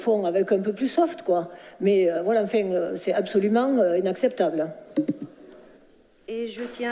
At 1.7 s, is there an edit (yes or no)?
no